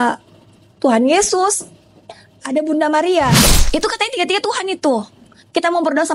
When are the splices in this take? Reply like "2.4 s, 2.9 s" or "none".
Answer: 3.5 s